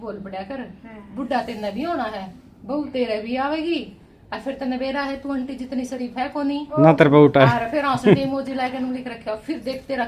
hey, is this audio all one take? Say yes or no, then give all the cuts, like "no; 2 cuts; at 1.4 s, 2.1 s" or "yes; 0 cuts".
yes; 0 cuts